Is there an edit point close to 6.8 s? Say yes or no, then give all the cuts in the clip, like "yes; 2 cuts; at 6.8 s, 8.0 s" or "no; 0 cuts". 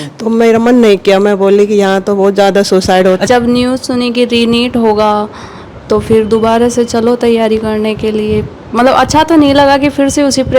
no; 1 cut; at 3.2 s